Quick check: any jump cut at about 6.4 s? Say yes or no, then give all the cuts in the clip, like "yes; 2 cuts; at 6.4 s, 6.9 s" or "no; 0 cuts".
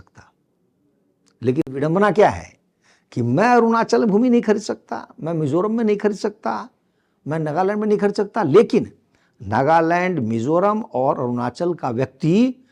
no; 0 cuts